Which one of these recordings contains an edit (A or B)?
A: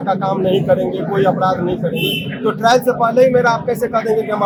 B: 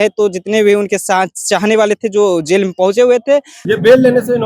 B